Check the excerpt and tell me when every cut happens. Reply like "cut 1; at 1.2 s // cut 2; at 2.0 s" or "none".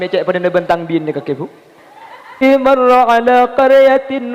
cut 1; at 2.3 s